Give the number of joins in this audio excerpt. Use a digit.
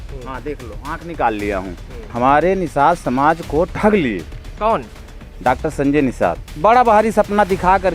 2